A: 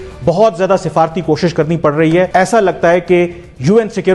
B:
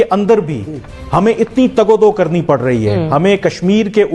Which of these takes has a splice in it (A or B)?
A